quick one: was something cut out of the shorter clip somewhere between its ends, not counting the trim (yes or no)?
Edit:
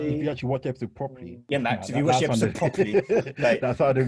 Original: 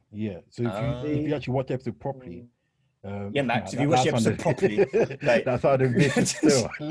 yes